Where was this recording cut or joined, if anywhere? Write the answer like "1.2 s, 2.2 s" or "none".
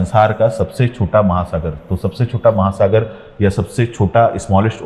none